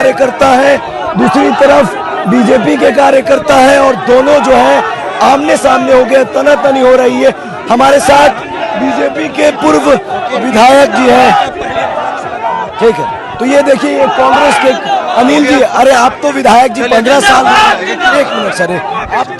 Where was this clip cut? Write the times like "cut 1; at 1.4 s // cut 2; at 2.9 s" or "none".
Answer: none

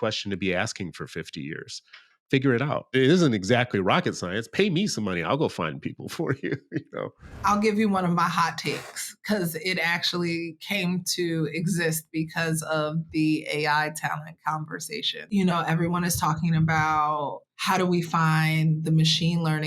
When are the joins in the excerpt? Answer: cut 1; at 2.9 s // cut 2; at 7.4 s // cut 3; at 15.2 s // cut 4; at 17.5 s

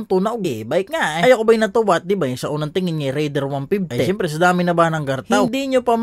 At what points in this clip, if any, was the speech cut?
none

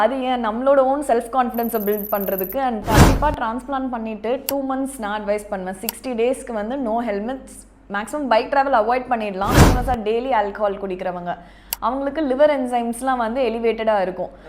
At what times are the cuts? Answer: cut 1; at 2.8 s // cut 2; at 9.6 s

